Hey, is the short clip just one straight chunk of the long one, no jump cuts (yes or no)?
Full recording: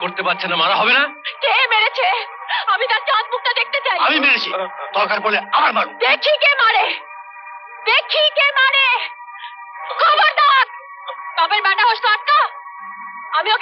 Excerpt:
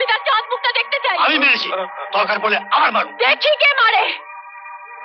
yes